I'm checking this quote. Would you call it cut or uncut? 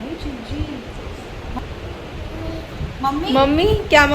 cut